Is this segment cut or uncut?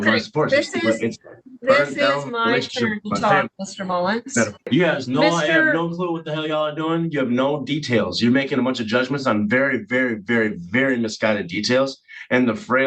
cut